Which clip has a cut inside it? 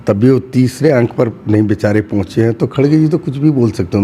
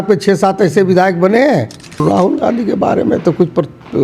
second; 1 cut; at 2.0 s

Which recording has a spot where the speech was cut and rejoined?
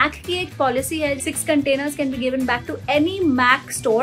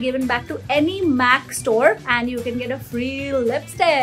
first; 1 cut; at 1.3 s

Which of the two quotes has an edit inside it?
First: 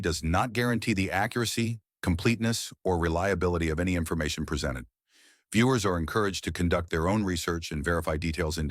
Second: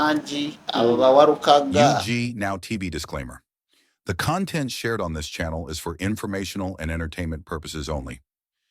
second; 1 cut; at 2.1 s

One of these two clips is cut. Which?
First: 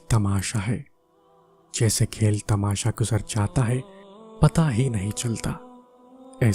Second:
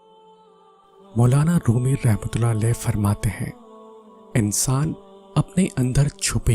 second; 1 cut; at 1.1 s

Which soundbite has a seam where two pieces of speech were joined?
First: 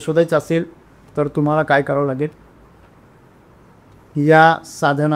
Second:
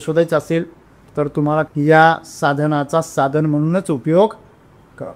second; 1 cut; at 1.7 s

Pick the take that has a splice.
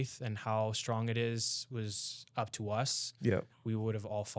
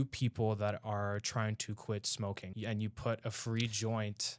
second; 1 cut; at 2.5 s

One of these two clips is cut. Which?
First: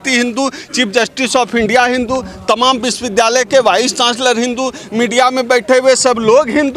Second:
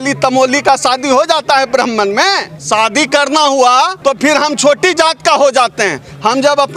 second; 2 cuts; at 2.5 s, 3.9 s

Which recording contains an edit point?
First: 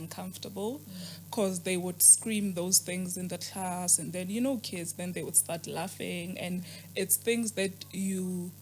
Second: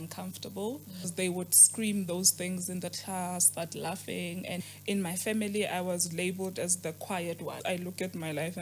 second; 4 cuts; at 1.1 s, 3.5 s, 4.6 s, 7.6 s

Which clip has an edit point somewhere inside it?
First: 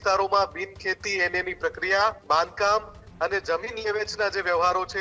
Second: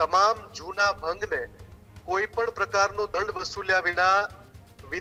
first; 1 cut; at 2.2 s

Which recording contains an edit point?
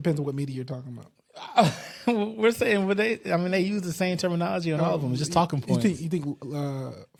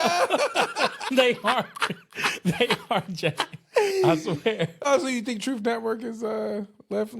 second; 2 cuts; at 1.0 s, 4.8 s

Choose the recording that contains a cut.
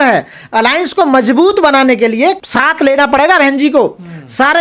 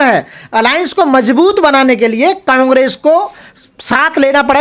first; 1 cut; at 2.4 s

